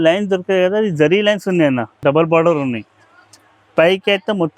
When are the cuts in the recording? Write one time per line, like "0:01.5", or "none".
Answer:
0:02.0